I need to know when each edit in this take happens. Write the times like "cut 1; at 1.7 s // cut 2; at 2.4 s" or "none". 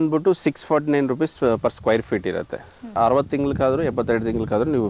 cut 1; at 2.9 s